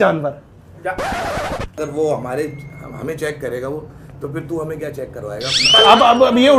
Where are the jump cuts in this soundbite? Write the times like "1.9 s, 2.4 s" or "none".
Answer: 1.8 s